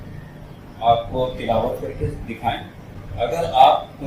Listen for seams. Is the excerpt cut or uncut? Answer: cut